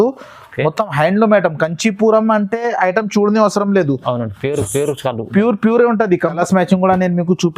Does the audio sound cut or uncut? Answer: cut